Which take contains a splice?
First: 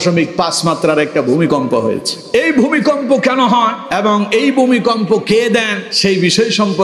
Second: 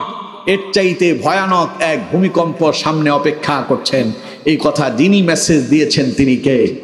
first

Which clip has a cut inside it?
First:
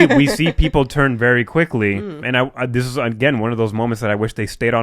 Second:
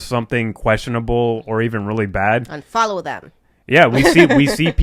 first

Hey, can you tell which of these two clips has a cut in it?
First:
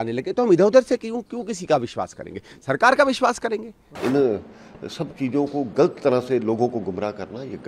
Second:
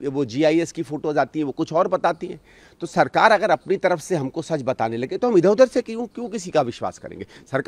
first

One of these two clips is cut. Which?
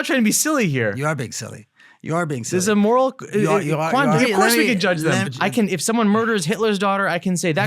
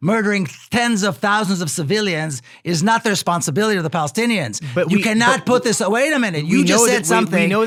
first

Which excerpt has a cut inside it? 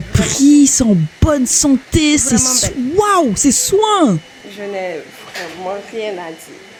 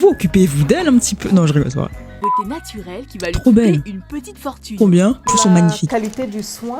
second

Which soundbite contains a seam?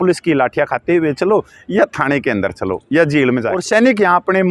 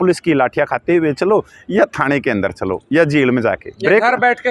first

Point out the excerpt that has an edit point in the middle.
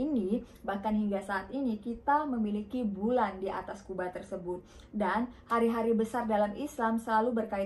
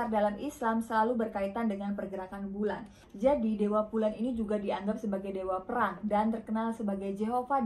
second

